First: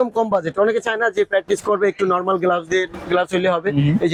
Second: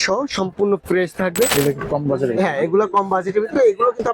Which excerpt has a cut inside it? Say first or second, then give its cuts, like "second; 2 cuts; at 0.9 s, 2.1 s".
second; 1 cut; at 1.5 s